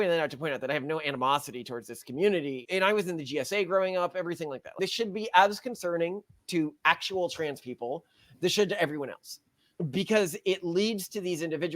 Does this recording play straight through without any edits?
no; 2 cuts; at 2.6 s, 4.7 s

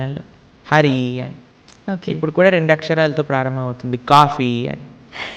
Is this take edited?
no; 0 cuts

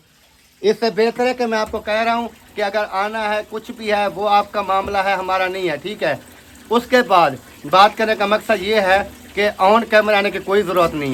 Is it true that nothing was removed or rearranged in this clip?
yes; 0 cuts

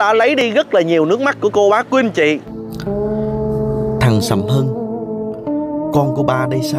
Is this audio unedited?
yes; 0 cuts

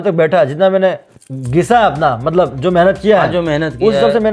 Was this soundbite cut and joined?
no; 0 cuts

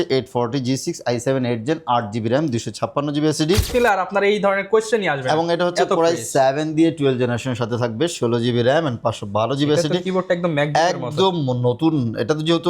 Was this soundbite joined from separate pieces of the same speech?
yes; 1 cut; at 3.7 s

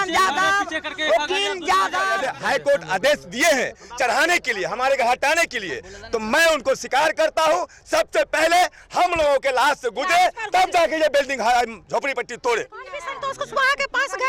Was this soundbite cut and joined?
yes; 2 cuts; at 2.2 s, 13.0 s

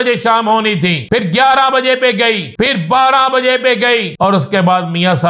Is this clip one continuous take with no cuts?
no; 3 cuts; at 1.2 s, 2.7 s, 4.1 s

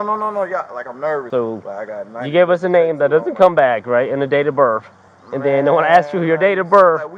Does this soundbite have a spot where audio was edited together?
yes; 1 cut; at 1.3 s

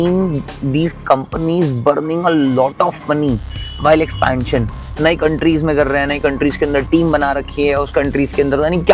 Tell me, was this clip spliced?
no; 0 cuts

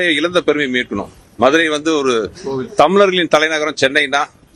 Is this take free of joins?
yes; 0 cuts

